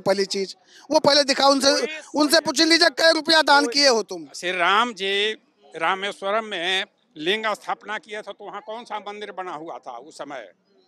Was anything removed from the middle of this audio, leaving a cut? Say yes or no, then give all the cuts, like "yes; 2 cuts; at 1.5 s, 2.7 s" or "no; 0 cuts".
yes; 1 cut; at 4.3 s